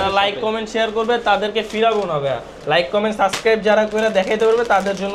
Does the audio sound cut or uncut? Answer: uncut